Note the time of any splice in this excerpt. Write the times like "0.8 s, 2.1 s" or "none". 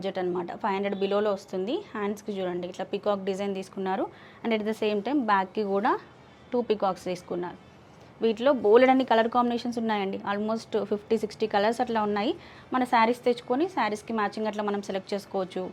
none